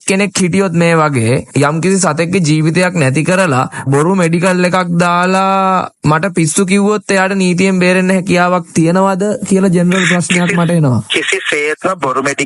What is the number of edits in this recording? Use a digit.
1